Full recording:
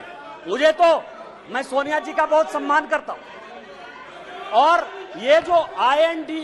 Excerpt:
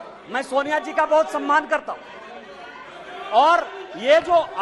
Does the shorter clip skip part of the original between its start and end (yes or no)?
no